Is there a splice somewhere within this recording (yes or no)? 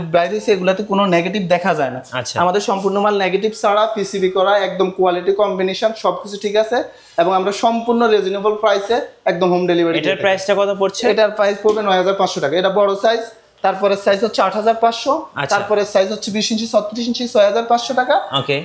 no